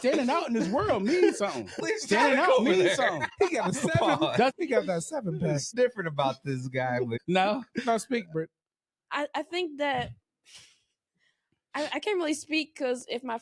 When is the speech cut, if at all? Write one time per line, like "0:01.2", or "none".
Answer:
0:01.8
0:03.2
0:04.5
0:05.7
0:07.2